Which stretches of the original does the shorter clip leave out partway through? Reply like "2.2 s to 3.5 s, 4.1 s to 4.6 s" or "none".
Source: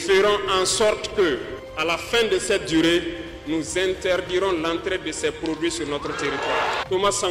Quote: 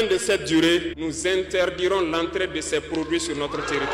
3.2 s to 3.5 s